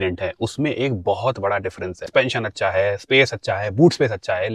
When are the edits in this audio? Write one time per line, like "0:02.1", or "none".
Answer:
0:02.1